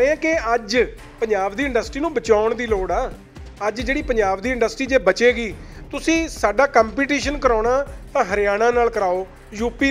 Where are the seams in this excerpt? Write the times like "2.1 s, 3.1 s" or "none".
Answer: none